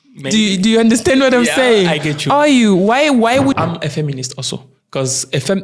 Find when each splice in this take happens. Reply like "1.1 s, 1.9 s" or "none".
3.6 s